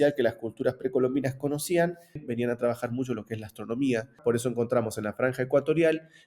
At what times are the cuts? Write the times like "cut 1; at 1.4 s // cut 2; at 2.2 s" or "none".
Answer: cut 1; at 2.3 s // cut 2; at 4.2 s